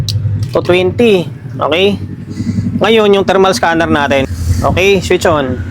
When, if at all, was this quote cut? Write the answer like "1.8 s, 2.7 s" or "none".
4.3 s